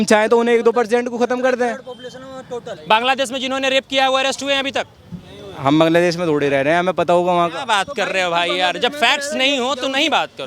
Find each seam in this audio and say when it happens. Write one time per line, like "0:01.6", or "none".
0:02.7

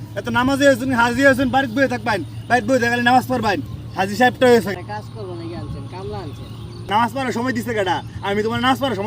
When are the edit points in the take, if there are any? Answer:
0:04.7
0:06.9

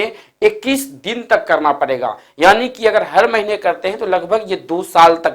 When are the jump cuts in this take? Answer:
none

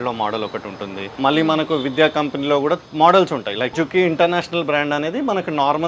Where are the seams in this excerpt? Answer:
0:01.0
0:02.9
0:03.7

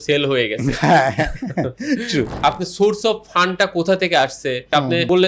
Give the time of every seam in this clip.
0:02.3

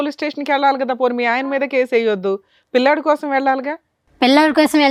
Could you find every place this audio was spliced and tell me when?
none

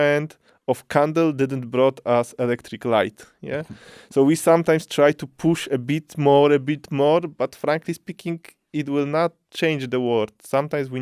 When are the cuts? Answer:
none

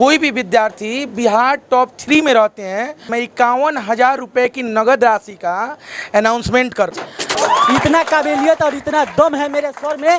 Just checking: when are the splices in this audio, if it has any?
0:03.1
0:07.3

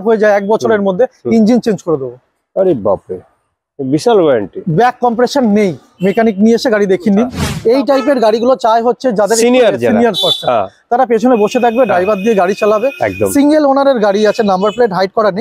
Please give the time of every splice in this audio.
0:07.4

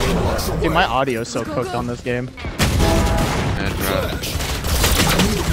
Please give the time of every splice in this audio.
0:02.4
0:03.6

